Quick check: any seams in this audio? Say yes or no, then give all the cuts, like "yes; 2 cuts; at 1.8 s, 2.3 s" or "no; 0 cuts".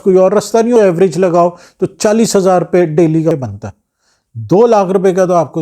yes; 2 cuts; at 0.8 s, 3.3 s